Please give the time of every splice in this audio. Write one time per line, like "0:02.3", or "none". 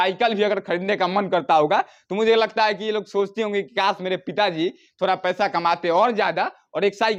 none